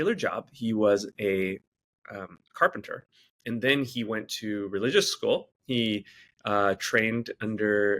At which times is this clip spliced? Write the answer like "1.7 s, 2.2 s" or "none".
none